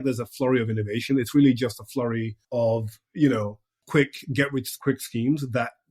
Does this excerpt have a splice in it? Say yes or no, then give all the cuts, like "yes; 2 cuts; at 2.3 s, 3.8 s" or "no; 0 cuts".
yes; 3 cuts; at 2.4 s, 3.8 s, 4.7 s